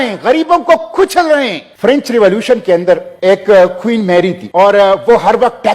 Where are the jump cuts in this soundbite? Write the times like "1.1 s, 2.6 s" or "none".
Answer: 1.6 s, 3.1 s, 4.4 s